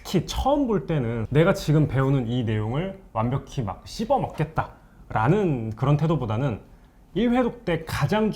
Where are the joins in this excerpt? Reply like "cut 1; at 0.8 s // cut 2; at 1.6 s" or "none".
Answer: cut 1; at 1.2 s